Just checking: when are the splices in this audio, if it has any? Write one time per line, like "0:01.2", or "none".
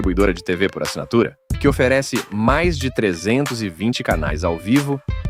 none